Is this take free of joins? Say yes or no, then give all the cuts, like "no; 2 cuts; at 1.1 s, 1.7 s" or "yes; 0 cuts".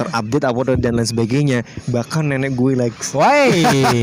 yes; 0 cuts